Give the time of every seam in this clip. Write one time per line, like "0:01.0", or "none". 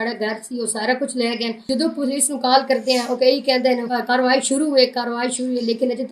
0:01.6
0:03.9